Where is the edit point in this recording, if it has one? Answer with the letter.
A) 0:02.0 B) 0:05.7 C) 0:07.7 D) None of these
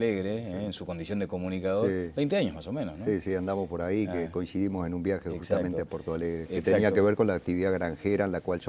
B